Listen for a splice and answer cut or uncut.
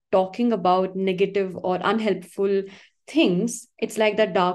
uncut